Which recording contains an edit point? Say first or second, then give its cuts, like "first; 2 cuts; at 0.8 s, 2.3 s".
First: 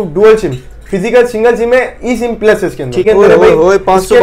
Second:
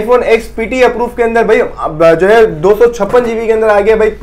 first; 1 cut; at 3.0 s